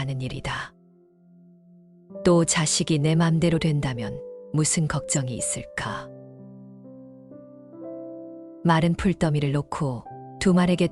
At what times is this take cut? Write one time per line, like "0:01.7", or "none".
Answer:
0:06.0
0:08.6